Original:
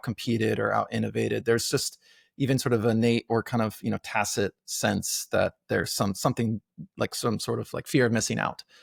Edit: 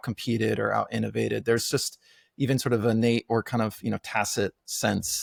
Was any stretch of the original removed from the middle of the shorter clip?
no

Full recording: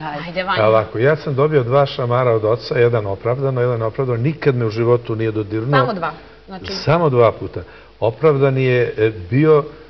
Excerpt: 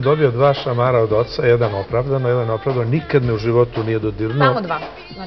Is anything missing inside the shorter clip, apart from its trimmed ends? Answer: no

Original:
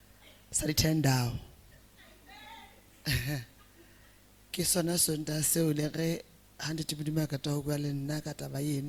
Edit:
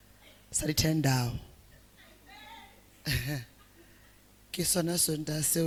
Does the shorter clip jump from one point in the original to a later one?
no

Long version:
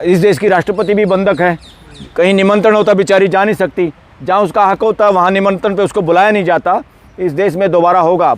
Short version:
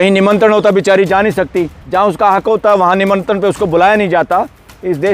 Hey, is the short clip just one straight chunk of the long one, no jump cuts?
no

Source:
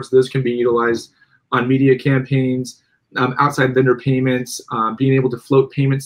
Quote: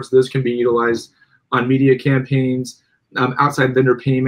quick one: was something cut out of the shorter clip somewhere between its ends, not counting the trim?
no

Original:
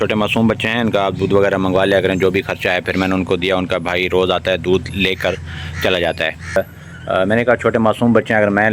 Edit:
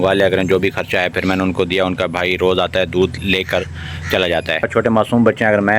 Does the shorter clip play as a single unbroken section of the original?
no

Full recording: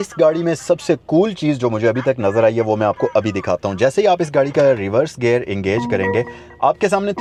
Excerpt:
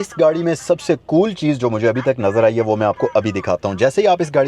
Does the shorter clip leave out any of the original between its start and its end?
no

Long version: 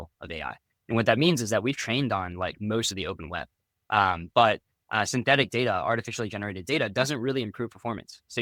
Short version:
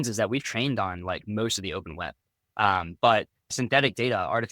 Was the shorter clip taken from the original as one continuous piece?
no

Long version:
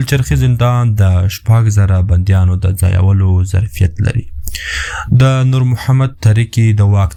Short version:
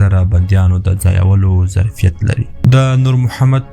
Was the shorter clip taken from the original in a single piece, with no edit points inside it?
no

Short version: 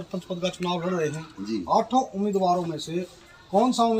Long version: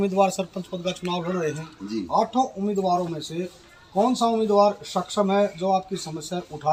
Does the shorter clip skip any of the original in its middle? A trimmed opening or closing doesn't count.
no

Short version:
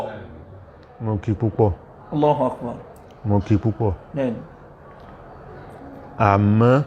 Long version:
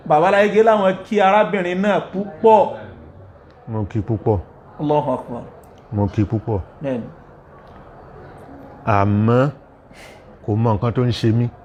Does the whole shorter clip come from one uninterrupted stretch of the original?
yes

